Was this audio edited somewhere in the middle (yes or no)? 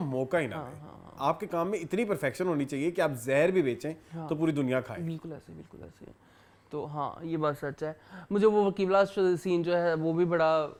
no